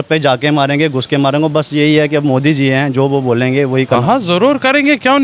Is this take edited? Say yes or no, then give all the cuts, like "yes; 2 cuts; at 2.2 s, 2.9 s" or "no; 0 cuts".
yes; 1 cut; at 3.9 s